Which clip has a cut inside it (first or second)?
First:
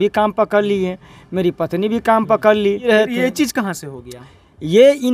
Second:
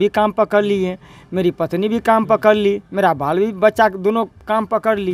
first